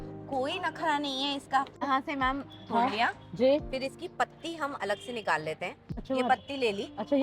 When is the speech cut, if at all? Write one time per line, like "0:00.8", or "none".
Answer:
0:01.8
0:06.0